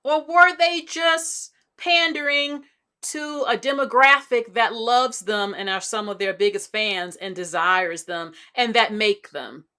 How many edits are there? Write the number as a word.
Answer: zero